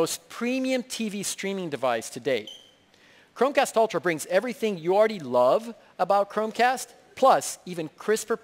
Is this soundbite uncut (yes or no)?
no